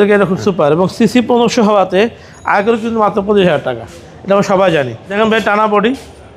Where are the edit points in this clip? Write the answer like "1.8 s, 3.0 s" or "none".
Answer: 5.0 s